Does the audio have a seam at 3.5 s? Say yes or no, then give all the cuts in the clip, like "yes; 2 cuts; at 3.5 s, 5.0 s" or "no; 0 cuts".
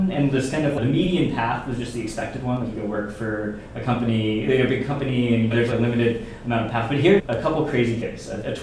no; 1 cut; at 7.2 s